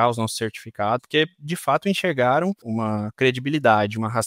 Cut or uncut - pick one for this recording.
cut